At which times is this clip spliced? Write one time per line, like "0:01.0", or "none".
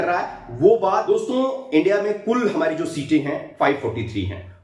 0:01.1